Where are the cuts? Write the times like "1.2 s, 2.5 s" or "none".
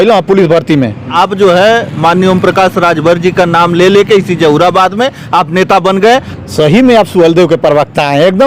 1.1 s, 6.3 s